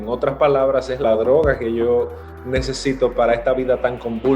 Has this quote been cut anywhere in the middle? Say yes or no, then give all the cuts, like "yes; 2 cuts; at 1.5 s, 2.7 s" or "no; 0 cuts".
yes; 1 cut; at 1.0 s